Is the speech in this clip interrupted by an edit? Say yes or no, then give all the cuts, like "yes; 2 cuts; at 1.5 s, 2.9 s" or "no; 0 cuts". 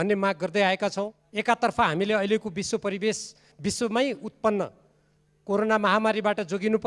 yes; 1 cut; at 1.2 s